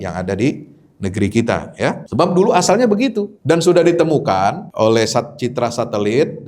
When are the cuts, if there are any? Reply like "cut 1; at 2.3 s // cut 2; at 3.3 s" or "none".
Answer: cut 1; at 2.0 s // cut 2; at 3.3 s // cut 3; at 4.7 s